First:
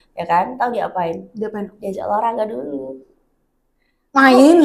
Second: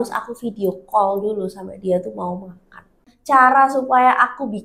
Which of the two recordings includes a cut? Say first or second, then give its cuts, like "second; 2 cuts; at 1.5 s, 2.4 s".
second; 1 cut; at 3.1 s